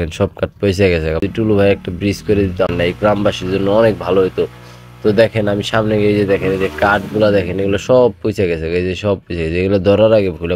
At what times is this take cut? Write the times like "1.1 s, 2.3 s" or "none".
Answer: 1.3 s, 2.7 s